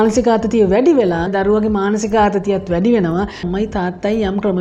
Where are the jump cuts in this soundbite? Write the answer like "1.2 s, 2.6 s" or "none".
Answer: 1.3 s, 3.4 s